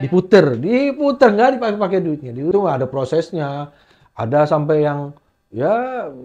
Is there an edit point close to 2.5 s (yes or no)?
yes